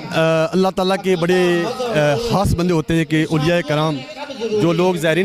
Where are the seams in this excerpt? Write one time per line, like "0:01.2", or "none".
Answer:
none